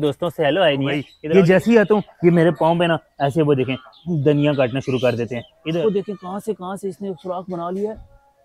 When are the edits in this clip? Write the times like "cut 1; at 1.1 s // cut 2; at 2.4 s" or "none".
cut 1; at 1.1 s // cut 2; at 5.4 s